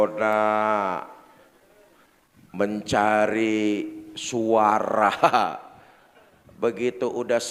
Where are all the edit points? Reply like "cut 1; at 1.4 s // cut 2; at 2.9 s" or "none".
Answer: none